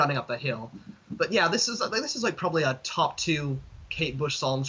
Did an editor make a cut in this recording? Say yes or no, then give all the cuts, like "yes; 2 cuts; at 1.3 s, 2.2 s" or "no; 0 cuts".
no; 0 cuts